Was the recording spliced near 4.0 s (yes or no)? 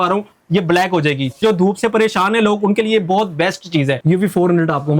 yes